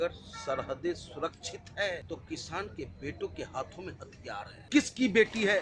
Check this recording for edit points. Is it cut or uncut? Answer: cut